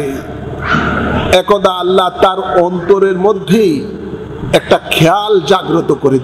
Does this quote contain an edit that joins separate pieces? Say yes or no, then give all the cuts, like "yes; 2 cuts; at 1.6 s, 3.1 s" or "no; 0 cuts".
no; 0 cuts